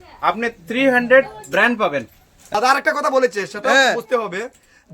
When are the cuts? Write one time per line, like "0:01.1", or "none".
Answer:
0:02.4